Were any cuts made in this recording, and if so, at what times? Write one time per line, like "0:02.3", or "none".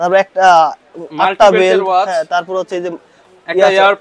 none

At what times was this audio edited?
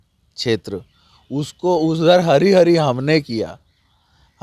none

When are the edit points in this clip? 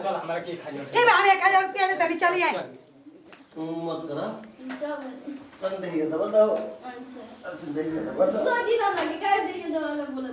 none

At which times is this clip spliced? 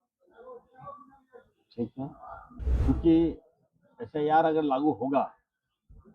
0:02.4

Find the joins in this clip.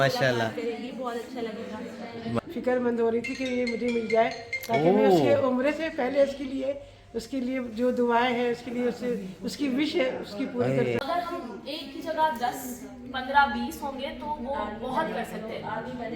0:02.4
0:11.0

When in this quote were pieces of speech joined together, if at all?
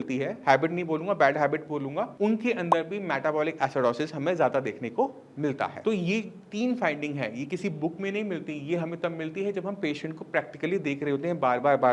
none

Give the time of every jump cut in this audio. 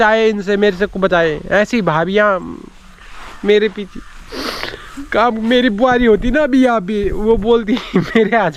none

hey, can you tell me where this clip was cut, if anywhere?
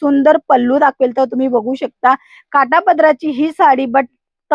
none

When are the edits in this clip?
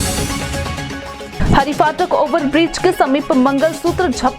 0:01.3

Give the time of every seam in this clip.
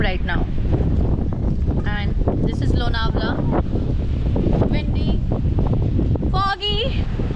none

